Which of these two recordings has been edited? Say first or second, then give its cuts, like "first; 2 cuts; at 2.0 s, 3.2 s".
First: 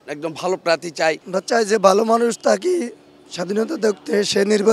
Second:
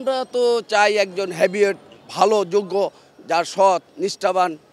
first; 1 cut; at 1.3 s